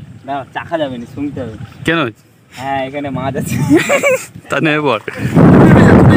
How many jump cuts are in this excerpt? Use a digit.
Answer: 1